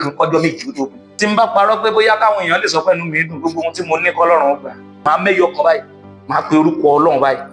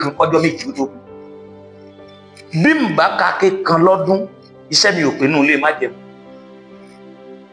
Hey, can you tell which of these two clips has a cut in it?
first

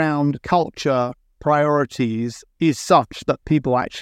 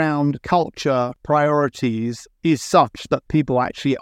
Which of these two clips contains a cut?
second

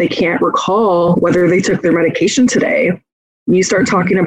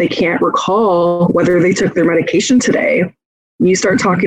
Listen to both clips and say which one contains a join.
first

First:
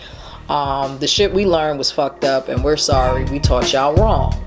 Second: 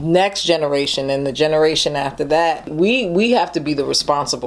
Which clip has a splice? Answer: second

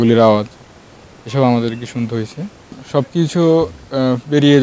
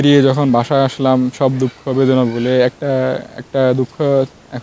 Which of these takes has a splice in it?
first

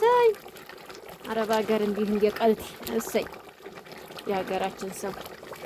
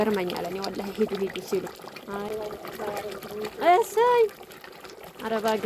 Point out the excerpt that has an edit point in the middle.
second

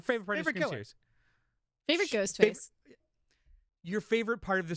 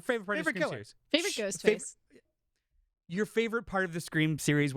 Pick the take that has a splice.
second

